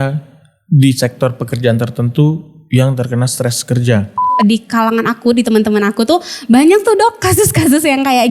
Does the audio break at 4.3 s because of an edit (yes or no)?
yes